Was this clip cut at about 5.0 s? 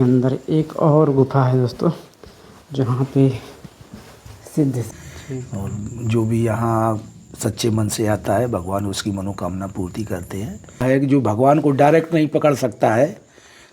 yes; 2 cuts; at 5.0 s, 10.8 s

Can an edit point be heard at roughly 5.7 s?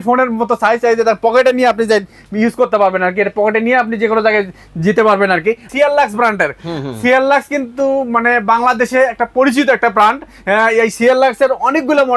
yes; 1 cut; at 5.7 s

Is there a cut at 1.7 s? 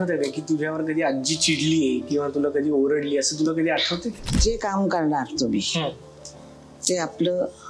no; 1 cut; at 4.2 s

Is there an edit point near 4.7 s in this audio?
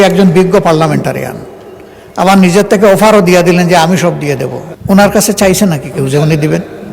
yes; 1 cut; at 4.7 s

